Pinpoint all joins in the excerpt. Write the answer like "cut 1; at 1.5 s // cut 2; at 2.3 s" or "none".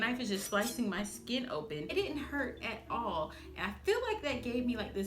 cut 1; at 1.9 s